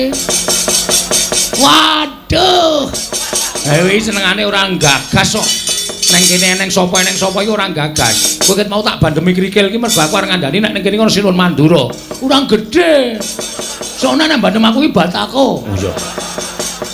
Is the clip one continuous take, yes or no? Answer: yes